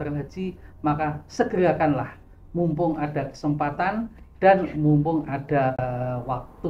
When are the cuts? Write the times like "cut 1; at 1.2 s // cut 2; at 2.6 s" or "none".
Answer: cut 1; at 5.8 s